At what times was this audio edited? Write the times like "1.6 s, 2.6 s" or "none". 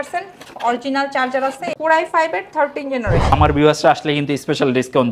1.7 s, 3.3 s